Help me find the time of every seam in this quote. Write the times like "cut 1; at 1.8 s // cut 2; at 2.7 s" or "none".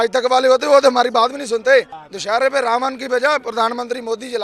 cut 1; at 2.0 s